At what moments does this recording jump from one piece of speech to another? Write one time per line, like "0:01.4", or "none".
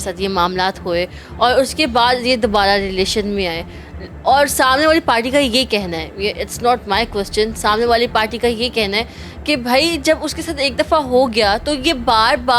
none